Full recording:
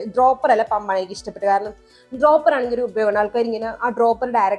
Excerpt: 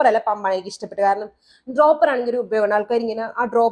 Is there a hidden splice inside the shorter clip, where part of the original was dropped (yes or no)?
no